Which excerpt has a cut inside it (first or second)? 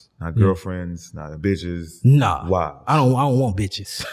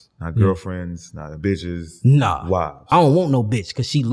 second